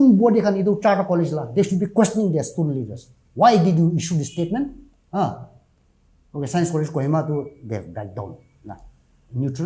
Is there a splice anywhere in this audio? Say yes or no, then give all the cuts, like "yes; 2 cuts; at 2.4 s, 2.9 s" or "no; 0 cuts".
no; 0 cuts